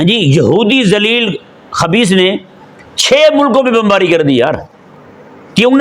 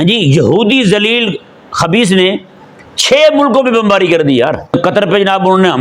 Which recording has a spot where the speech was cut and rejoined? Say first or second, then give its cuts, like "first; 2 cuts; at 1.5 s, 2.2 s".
second; 1 cut; at 4.8 s